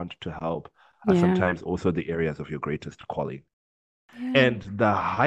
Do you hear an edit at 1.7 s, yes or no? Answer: no